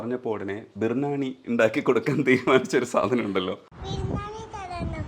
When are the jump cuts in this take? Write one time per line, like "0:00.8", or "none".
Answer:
0:03.7